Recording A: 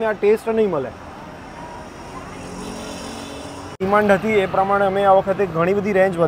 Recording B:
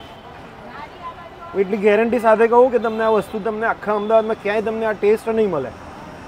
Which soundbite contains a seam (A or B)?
A